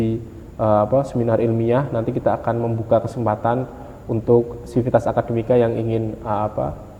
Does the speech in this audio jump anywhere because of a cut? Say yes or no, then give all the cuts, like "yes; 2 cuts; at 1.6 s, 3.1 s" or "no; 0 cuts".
no; 0 cuts